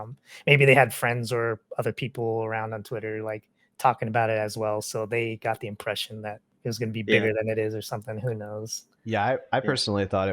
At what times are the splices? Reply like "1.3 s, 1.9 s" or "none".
6.5 s